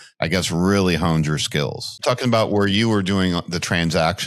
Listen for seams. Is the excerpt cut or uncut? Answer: cut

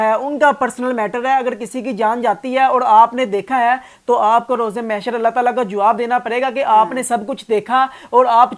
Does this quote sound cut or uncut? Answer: uncut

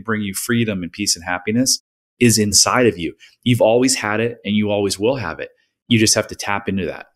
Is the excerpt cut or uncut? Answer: cut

